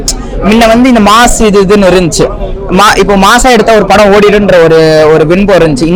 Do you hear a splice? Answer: no; 0 cuts

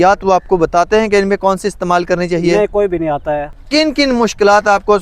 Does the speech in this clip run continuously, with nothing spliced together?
no; 1 cut; at 3.5 s

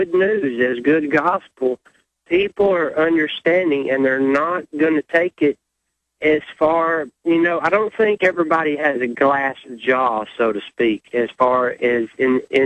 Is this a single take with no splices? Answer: yes; 0 cuts

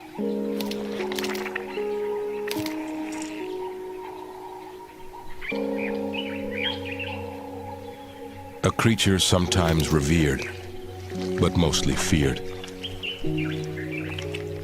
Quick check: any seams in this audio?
yes; 1 cut; at 5.7 s

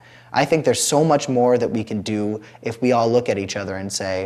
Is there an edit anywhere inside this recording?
no; 0 cuts

